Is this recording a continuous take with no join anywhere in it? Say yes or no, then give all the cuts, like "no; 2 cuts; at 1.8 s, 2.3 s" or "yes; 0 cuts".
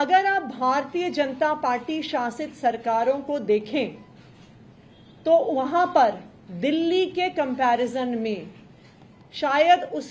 yes; 0 cuts